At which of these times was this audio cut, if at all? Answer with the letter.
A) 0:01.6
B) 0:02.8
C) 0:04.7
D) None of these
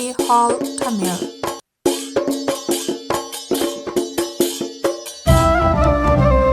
A